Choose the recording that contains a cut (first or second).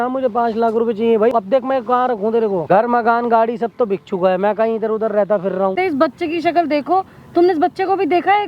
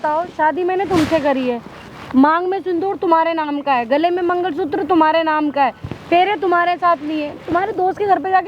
first